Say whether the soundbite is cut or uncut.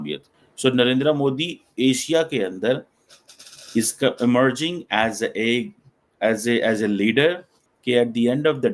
uncut